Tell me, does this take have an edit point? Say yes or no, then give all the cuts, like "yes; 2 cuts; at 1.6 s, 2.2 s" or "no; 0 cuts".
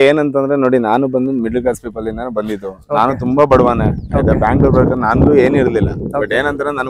no; 0 cuts